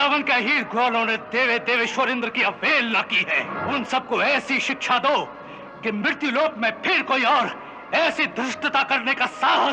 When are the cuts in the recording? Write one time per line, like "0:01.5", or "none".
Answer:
0:03.5